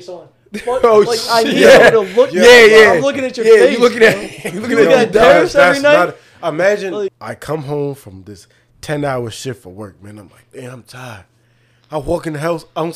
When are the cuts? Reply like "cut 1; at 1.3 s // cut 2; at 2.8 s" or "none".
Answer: cut 1; at 7.1 s